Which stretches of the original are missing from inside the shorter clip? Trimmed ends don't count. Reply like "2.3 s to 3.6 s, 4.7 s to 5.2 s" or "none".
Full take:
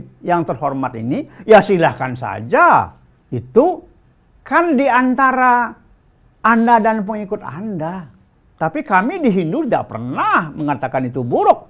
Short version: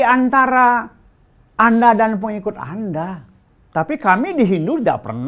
none